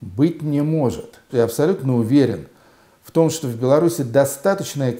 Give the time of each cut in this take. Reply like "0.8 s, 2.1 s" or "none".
1.3 s